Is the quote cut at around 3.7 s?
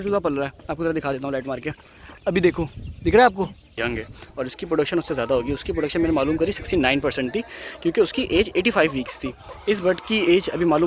yes; 1 cut; at 3.7 s

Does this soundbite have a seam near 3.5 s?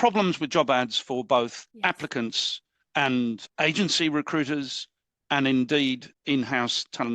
yes; 3 cuts; at 1.6 s, 3.5 s, 6.1 s

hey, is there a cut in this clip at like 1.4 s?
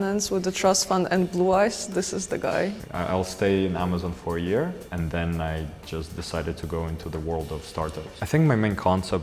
no; 3 cuts; at 2.8 s, 4.8 s, 7.9 s

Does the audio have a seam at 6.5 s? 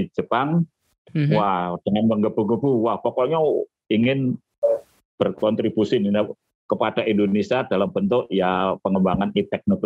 no; 1 cut; at 3.7 s

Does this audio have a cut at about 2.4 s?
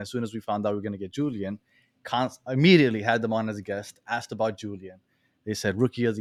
no; 0 cuts

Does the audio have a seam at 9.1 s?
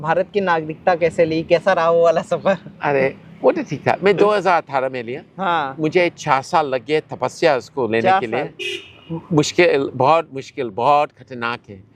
no; 0 cuts

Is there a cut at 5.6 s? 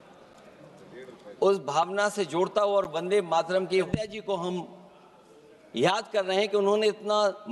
no; 1 cut; at 3.9 s

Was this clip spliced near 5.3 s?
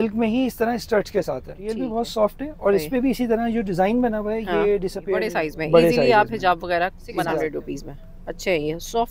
yes; 3 cuts; at 1.8 s, 5.3 s, 7.4 s

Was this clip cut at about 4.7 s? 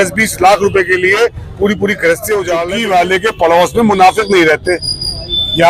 no; 1 cut; at 2.5 s

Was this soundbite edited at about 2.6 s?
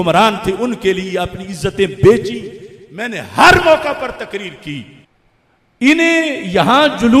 no; 1 cut; at 5.0 s

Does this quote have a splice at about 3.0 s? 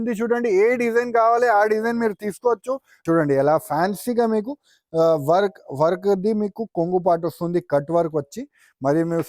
yes; 1 cut; at 3.0 s

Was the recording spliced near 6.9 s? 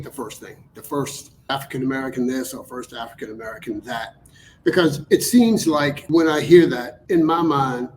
yes; 3 cuts; at 1.3 s, 6.0 s, 6.9 s

